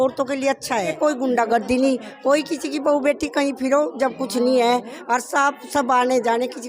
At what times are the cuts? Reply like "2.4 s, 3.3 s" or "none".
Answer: 1.0 s